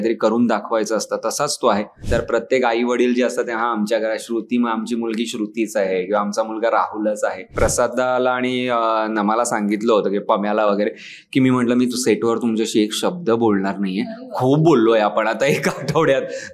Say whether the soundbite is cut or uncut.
cut